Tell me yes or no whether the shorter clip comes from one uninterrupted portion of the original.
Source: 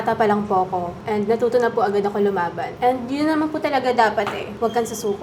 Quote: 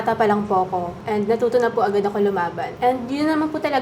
yes